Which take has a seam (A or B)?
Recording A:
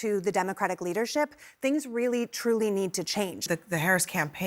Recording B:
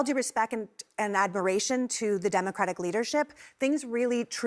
A